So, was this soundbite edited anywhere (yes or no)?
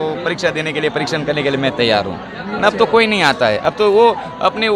no